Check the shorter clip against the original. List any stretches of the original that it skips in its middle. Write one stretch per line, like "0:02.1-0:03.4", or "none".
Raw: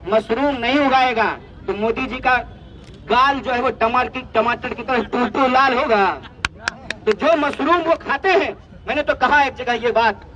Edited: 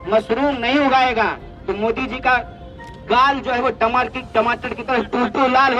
none

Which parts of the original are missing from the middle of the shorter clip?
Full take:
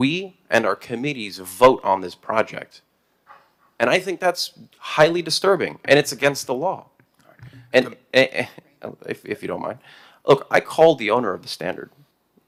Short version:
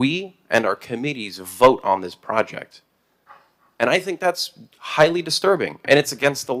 none

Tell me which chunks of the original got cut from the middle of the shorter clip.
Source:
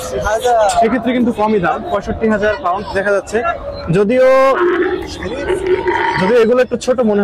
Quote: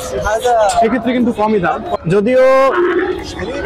0:01.9-0:03.8

